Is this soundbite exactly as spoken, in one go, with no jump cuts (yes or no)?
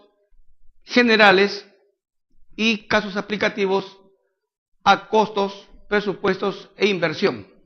no